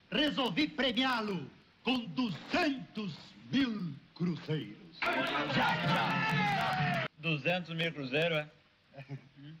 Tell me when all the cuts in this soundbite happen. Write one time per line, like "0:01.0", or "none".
0:07.1